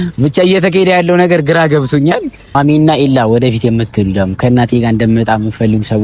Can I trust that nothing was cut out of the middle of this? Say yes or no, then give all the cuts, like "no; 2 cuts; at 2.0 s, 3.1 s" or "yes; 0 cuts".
no; 1 cut; at 2.6 s